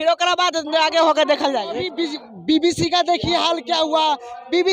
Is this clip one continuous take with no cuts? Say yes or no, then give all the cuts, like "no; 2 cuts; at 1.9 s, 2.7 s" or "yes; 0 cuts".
no; 1 cut; at 1.9 s